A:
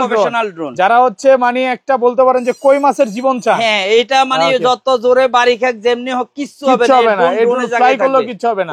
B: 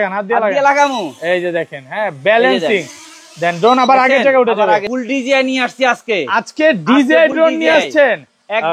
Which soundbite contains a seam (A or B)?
B